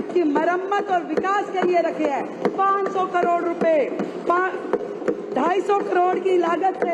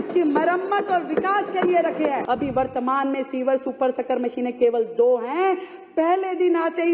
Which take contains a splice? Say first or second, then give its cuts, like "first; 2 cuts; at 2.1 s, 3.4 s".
second; 1 cut; at 2.2 s